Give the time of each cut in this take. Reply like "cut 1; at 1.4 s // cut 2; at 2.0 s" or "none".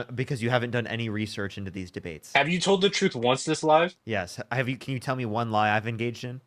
none